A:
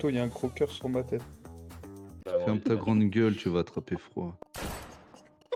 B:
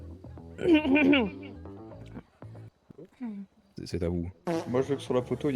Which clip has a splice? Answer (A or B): B